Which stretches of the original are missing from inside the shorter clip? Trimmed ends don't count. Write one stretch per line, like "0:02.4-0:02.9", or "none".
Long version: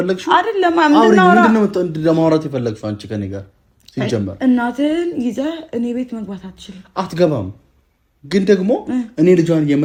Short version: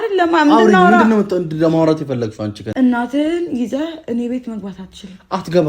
0:03.1-0:04.3